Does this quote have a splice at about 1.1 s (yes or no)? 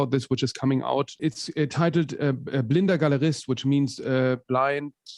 yes